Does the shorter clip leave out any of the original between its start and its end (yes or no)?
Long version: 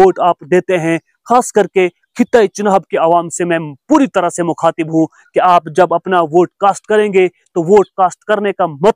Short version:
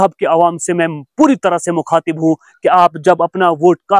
no